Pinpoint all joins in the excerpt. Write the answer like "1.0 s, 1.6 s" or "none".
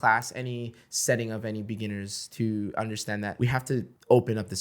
3.7 s